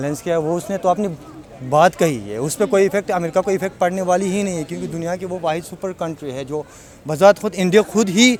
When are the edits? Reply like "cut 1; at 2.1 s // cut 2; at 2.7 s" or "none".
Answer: none